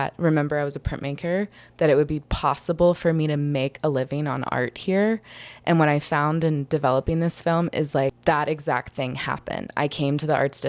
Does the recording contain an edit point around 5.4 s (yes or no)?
no